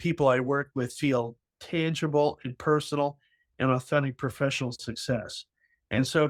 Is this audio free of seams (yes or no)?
yes